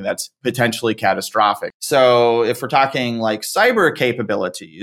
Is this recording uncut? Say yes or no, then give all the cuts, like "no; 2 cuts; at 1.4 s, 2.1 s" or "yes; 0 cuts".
no; 1 cut; at 1.7 s